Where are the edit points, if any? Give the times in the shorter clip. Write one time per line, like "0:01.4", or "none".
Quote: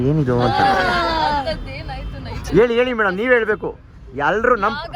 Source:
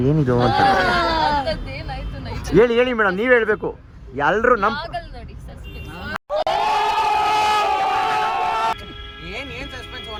none